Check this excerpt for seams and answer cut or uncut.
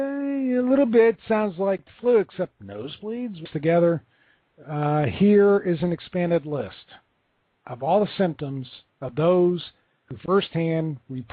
uncut